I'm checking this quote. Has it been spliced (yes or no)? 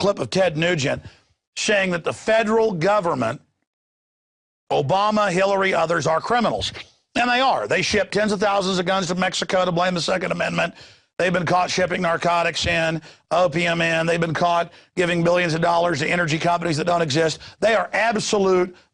no